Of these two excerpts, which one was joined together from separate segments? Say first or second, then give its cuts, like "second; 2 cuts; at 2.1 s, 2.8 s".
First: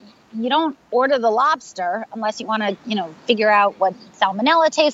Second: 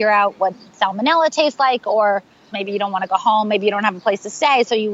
second; 1 cut; at 2.5 s